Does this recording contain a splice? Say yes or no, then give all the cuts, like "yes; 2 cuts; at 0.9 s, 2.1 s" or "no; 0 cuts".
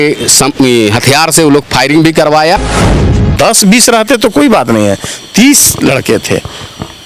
yes; 1 cut; at 3.0 s